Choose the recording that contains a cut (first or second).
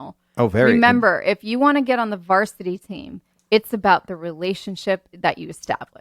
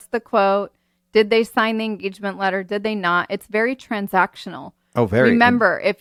first